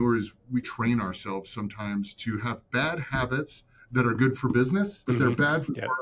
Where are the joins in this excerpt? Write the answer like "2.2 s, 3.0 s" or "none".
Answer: 5.0 s